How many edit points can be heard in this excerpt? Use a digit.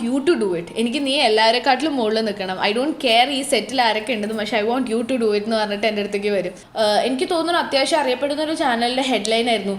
1